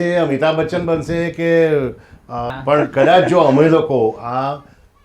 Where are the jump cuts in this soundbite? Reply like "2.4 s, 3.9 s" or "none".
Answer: 2.5 s